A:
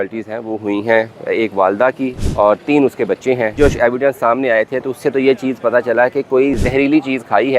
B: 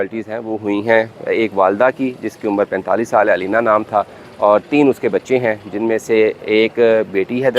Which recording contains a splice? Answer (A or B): A